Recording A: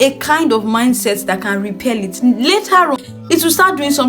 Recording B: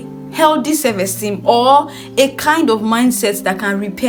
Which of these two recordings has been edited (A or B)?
A